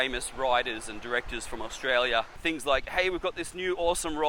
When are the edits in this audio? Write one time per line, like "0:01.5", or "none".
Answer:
0:02.4